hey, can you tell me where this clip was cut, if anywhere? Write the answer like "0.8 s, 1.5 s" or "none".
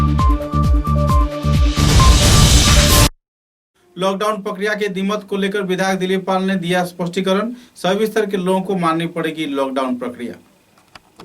3.2 s